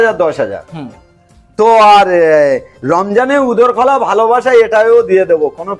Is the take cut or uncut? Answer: uncut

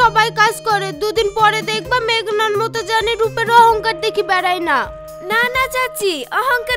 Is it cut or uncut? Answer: uncut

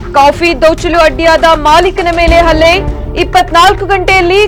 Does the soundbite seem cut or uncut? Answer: uncut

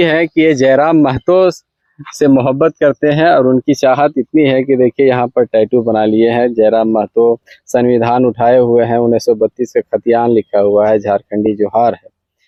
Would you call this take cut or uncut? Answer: uncut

